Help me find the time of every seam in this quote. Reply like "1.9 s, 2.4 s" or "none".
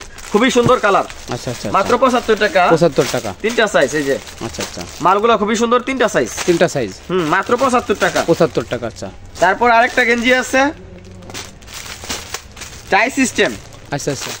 none